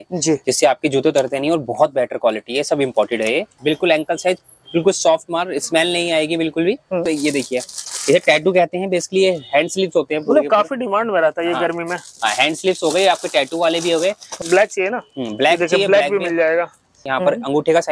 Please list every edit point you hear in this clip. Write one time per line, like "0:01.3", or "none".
0:03.5
0:07.1
0:14.3
0:17.0